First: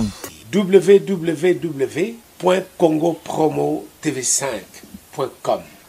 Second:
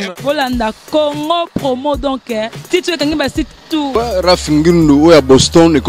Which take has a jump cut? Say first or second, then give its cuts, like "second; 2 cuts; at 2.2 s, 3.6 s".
second; 1 cut; at 3.9 s